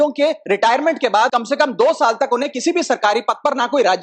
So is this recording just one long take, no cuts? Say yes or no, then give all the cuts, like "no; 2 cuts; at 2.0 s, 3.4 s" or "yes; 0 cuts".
no; 1 cut; at 1.4 s